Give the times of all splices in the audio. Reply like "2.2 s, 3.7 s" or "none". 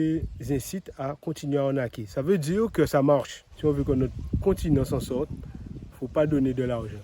3.4 s